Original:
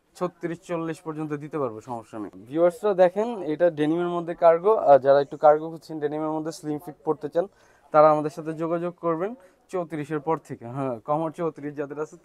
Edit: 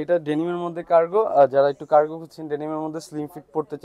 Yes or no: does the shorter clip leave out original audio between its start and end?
no